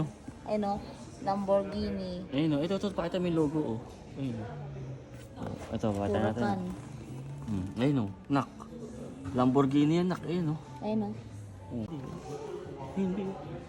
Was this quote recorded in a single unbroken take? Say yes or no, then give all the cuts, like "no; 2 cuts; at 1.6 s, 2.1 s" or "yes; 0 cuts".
no; 1 cut; at 11.9 s